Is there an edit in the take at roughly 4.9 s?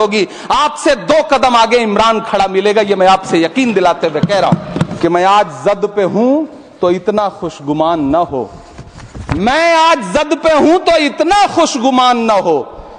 yes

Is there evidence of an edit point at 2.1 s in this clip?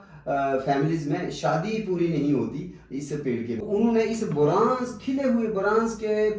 no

